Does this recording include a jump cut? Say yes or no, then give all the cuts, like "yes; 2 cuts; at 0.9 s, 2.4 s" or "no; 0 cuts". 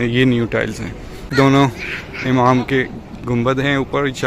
yes; 1 cut; at 1.3 s